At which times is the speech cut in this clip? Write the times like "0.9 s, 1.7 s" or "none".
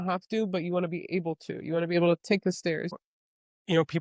2.9 s

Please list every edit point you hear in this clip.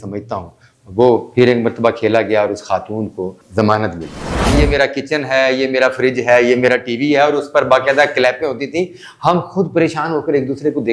3.4 s, 4.5 s

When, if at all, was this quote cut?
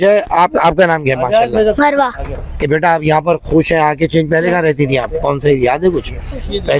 none

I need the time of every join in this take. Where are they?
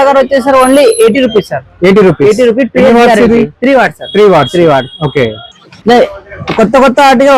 none

